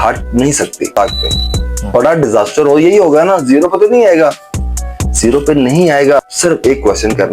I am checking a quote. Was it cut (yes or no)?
yes